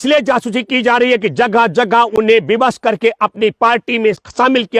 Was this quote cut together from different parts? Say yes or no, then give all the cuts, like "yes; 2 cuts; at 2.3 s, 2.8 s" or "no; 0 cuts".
no; 0 cuts